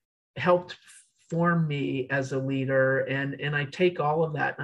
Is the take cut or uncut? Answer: uncut